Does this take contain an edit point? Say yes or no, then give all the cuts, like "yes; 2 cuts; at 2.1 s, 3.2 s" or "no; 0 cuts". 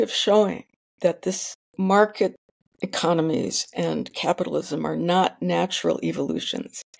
yes; 1 cut; at 1.6 s